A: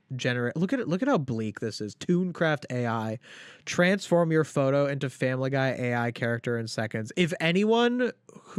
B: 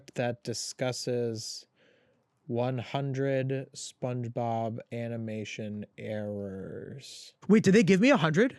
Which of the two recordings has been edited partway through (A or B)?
B